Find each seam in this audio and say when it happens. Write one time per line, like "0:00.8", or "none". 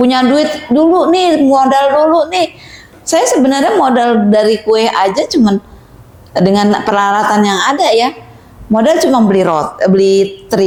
none